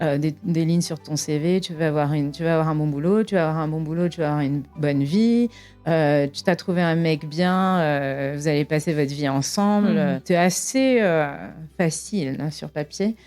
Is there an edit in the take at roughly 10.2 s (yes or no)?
yes